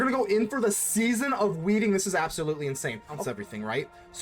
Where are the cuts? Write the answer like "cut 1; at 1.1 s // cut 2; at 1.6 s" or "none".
cut 1; at 3.2 s

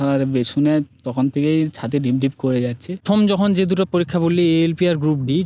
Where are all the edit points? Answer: cut 1; at 3.0 s

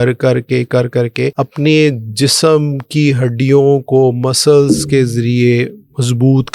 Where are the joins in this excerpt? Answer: cut 1; at 1.3 s

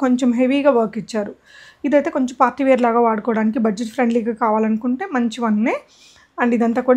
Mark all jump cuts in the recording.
none

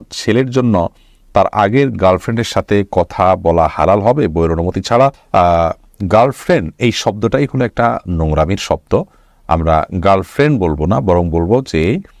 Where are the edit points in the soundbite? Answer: none

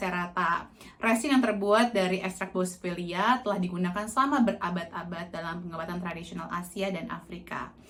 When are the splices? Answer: none

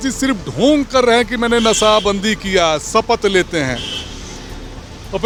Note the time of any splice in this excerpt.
none

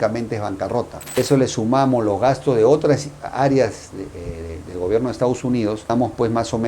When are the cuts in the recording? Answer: cut 1; at 1.2 s

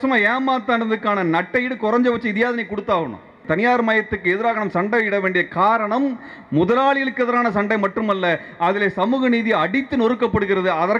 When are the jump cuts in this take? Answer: cut 1; at 3.4 s

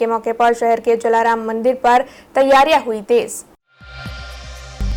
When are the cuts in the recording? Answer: cut 1; at 3.6 s

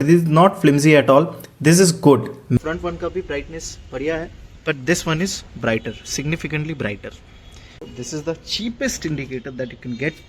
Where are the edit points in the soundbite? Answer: cut 1; at 2.6 s // cut 2; at 7.9 s

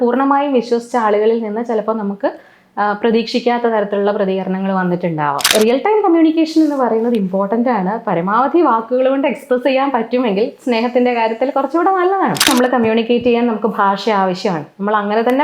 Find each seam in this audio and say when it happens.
cut 1; at 5.5 s // cut 2; at 12.5 s

